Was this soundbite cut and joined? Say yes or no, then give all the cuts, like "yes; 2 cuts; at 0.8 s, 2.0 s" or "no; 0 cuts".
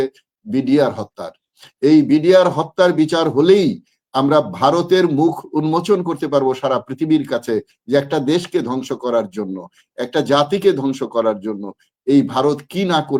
no; 0 cuts